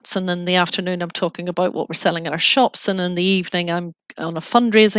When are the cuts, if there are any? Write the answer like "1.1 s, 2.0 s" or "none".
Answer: none